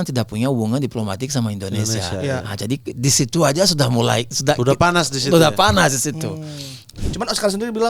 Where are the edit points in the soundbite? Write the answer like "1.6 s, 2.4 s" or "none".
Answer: 7.0 s